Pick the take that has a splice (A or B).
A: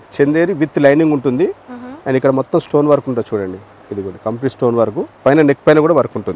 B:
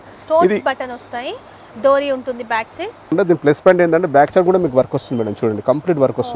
B